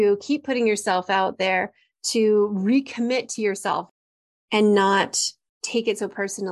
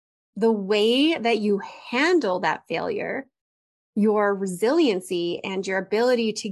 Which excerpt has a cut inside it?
first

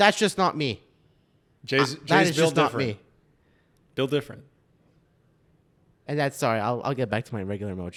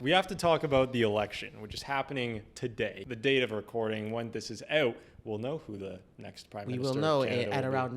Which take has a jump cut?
second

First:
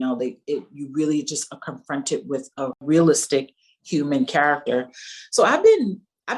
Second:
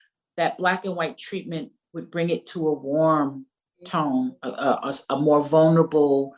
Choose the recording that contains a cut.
first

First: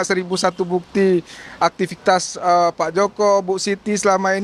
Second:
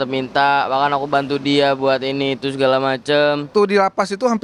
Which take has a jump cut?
second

